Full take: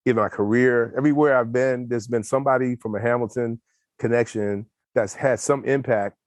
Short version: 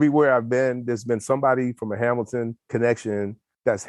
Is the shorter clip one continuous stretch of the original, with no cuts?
no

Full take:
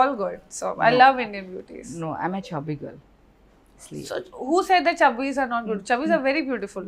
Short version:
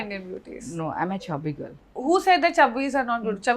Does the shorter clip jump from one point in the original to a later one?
yes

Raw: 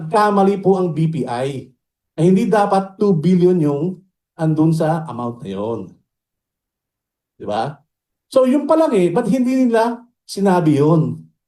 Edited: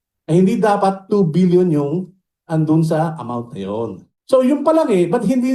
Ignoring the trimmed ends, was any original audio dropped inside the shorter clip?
yes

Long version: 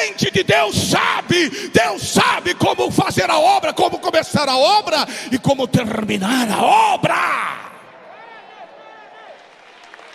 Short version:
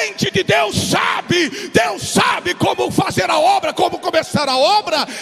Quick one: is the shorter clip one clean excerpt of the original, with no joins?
yes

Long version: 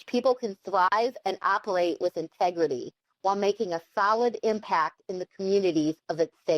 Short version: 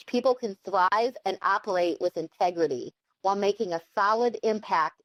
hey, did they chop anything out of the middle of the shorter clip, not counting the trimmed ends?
no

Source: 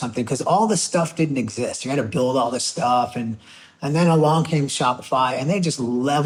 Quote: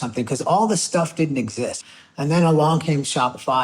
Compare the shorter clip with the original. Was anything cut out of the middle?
yes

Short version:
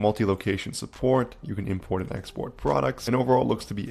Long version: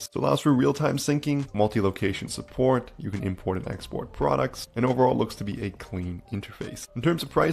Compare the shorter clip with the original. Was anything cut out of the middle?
yes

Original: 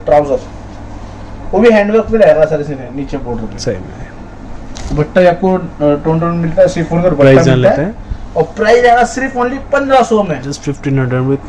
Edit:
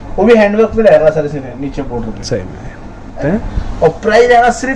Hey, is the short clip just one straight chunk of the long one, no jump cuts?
no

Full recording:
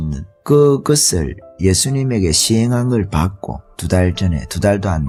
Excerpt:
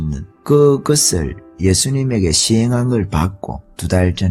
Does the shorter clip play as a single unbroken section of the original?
yes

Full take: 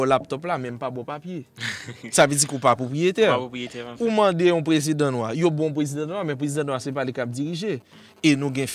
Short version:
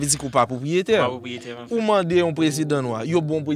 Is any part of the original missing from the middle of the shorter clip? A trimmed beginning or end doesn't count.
no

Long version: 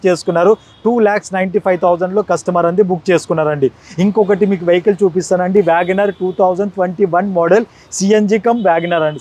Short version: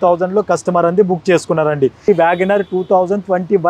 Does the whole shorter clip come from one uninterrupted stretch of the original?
no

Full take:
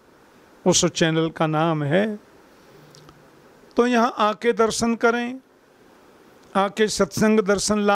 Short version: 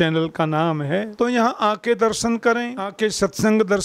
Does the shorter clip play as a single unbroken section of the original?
no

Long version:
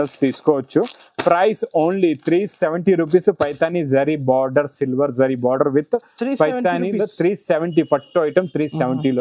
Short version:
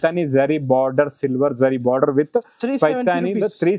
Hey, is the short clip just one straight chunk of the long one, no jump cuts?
yes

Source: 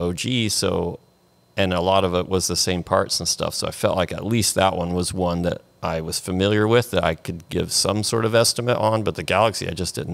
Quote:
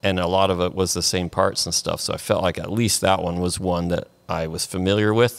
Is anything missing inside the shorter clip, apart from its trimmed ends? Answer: no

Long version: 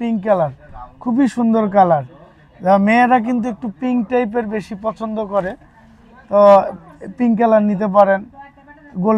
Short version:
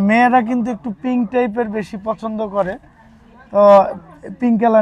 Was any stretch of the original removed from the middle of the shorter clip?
no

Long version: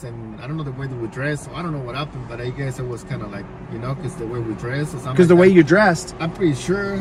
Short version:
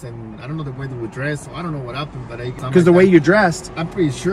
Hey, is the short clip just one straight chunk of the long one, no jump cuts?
no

